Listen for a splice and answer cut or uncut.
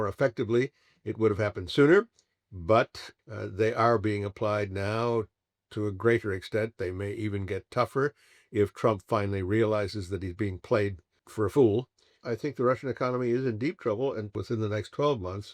cut